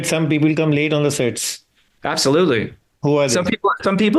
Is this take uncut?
yes; 0 cuts

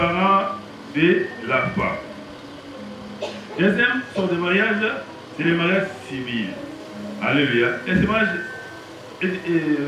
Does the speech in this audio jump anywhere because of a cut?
no; 0 cuts

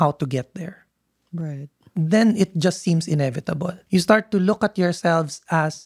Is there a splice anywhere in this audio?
yes; 1 cut; at 3.8 s

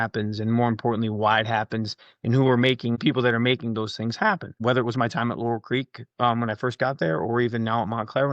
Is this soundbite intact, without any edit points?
no; 2 cuts; at 3.0 s, 4.6 s

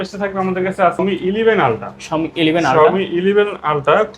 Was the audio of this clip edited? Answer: yes; 1 cut; at 1.0 s

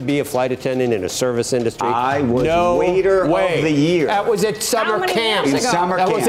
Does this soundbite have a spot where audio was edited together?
no; 0 cuts

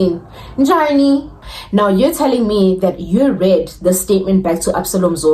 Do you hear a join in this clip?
yes; 1 cut; at 1.4 s

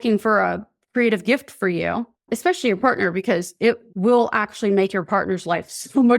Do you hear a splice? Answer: yes; 1 cut; at 2.3 s

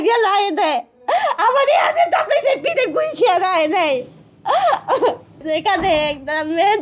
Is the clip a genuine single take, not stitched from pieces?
no; 1 cut; at 5.4 s

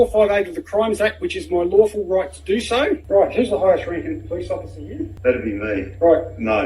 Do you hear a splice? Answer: yes; 2 cuts; at 3.0 s, 5.1 s

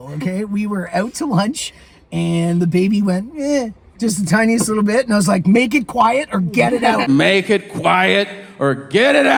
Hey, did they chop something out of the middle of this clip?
no; 0 cuts

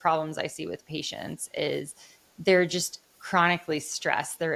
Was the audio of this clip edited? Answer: no; 0 cuts

